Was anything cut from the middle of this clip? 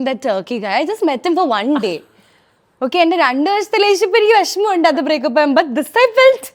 no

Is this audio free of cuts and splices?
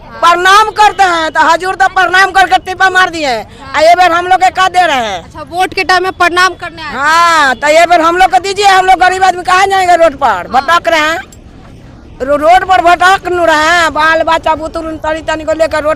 yes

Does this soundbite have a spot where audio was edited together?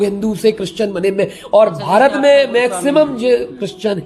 no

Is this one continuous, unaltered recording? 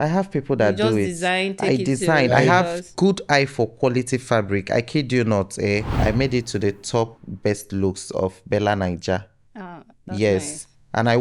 no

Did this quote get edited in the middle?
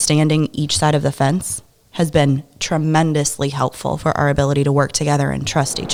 no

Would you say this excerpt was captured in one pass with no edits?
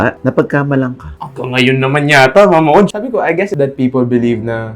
no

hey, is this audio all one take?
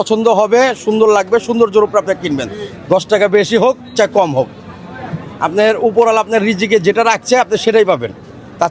yes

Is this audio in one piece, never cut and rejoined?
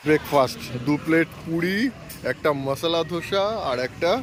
yes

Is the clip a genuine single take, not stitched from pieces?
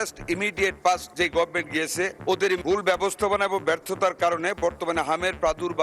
no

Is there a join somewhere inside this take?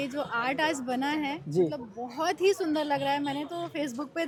no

